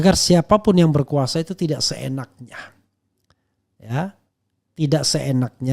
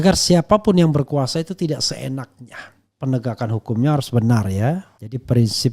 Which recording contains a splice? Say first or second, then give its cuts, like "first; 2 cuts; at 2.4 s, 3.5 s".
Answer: second; 1 cut; at 2.9 s